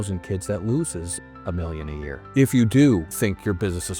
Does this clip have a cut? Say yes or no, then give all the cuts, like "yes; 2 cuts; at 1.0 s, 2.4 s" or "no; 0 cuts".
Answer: yes; 2 cuts; at 2.3 s, 3.1 s